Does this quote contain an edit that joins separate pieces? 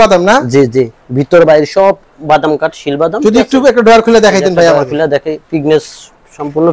no; 0 cuts

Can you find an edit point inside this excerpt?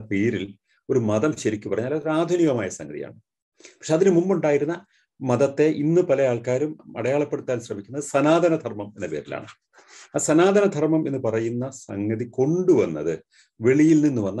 no; 0 cuts

